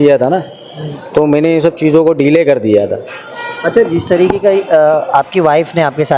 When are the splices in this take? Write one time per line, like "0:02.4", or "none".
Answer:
none

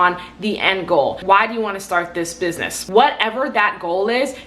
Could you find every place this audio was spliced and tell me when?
0:01.2
0:02.7

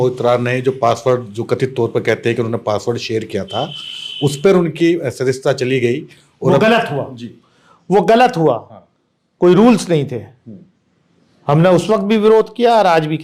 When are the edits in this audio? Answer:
none

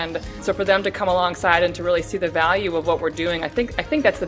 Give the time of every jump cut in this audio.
none

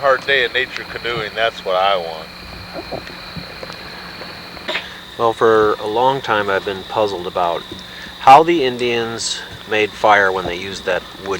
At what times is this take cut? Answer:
0:04.7

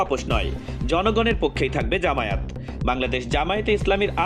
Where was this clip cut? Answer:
none

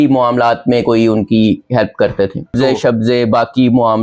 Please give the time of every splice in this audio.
0:02.5

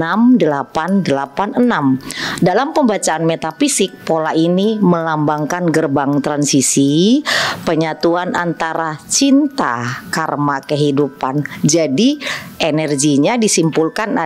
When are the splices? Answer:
none

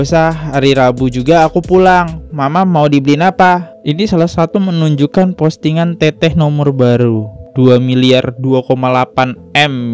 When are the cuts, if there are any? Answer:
0:03.7

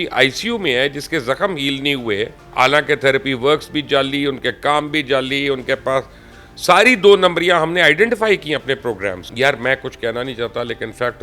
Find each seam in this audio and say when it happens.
0:02.5
0:09.3

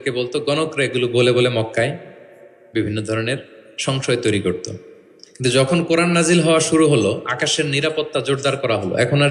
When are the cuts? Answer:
none

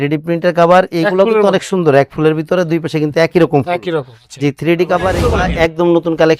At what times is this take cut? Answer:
0:05.2

